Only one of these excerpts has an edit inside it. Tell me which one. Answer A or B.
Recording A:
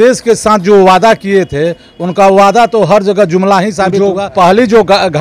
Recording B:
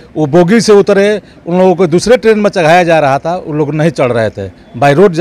A